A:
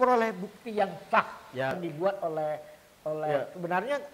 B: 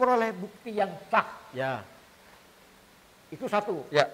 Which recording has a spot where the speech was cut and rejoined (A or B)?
A